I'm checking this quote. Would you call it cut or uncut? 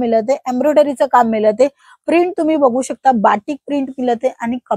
uncut